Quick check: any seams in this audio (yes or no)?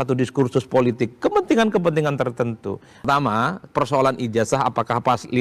yes